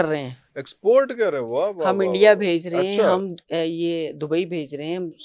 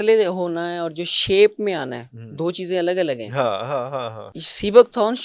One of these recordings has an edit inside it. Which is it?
second; 1 cut; at 4.2 s

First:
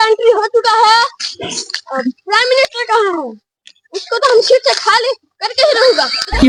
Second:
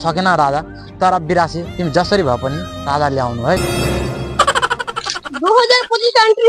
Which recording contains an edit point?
second; 1 cut; at 3.6 s

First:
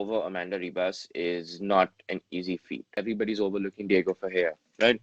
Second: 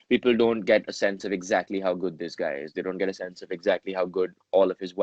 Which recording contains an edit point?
first; 1 cut; at 2.9 s

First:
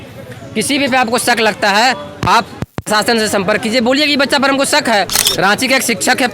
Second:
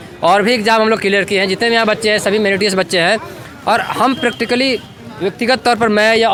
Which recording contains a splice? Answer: first; 1 cut; at 5.2 s

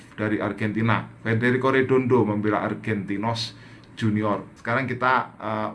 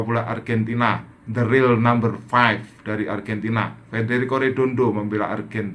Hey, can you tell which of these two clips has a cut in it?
first; 1 cut; at 4.5 s

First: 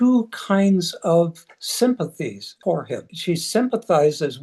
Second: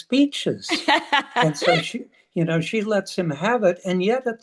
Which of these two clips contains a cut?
first; 2 cuts; at 2.5 s, 3.1 s

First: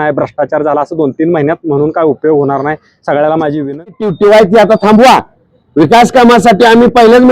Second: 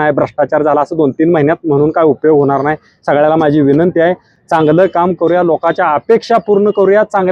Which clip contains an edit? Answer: first; 1 cut; at 4.0 s

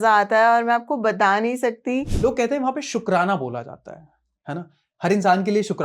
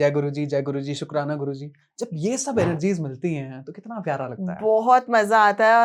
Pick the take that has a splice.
first; 1 cut; at 2.1 s

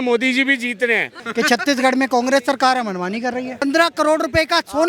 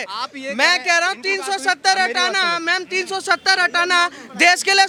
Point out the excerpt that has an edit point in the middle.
first; 2 cuts; at 1.2 s, 3.6 s

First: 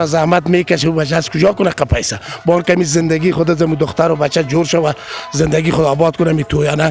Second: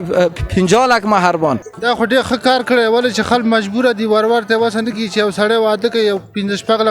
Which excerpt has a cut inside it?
second; 1 cut; at 1.7 s

